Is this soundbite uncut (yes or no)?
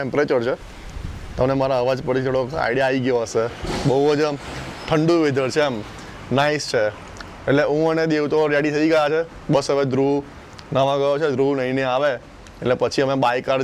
yes